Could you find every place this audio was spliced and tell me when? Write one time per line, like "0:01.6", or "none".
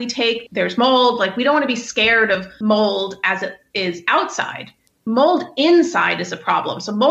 0:02.5